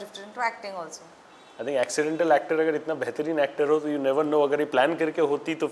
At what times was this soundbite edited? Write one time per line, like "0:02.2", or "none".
none